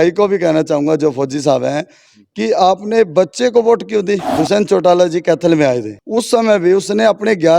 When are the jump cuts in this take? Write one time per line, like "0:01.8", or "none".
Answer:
0:04.3
0:06.0

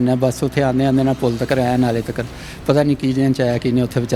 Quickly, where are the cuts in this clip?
none

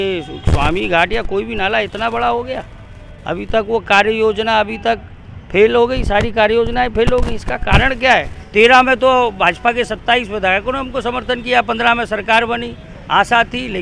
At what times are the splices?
0:08.4

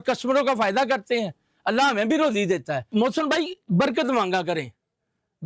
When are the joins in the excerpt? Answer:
0:02.9

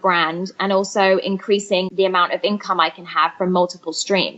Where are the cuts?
0:01.9

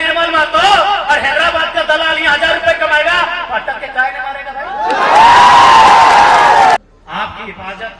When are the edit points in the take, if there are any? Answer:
0:06.8

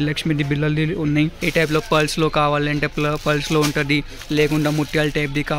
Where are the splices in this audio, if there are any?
0:01.4

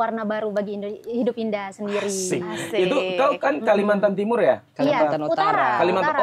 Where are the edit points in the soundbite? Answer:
none

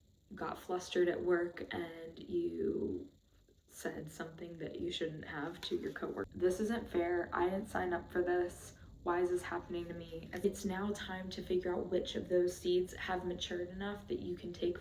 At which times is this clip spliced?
0:06.3
0:10.4

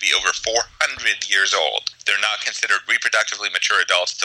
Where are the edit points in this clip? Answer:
0:02.0

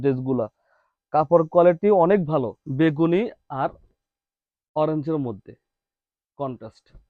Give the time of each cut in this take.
0:02.6

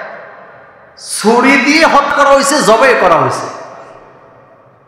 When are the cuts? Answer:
0:02.1

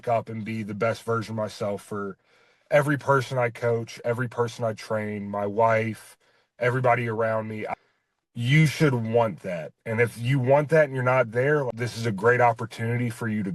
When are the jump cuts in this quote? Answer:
none

